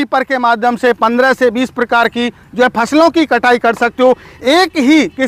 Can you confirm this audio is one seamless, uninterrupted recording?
yes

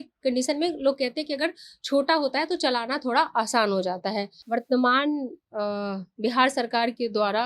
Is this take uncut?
no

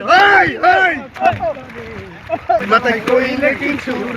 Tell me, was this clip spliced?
yes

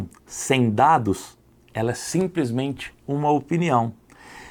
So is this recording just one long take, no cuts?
yes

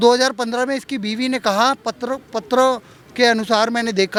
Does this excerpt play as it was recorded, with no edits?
yes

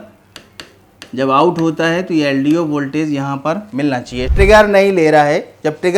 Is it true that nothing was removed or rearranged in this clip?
no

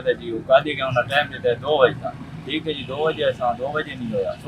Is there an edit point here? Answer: no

